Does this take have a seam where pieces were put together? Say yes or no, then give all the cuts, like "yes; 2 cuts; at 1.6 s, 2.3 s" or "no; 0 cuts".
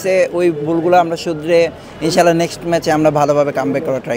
no; 0 cuts